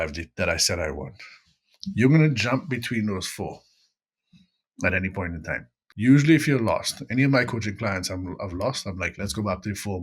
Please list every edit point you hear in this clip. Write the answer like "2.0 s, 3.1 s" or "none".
5.8 s